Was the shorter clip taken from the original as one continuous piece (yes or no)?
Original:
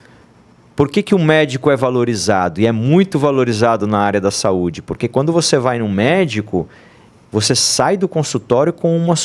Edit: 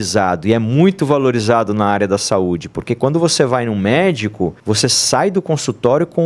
no